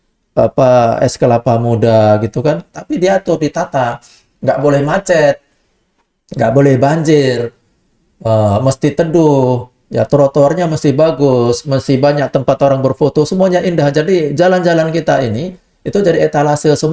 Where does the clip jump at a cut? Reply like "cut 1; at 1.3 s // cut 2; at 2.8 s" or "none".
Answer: none